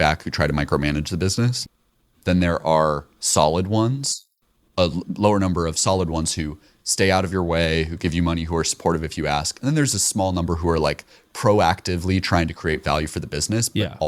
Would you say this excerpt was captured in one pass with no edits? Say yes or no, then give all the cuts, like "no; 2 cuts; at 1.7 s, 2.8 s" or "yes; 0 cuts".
yes; 0 cuts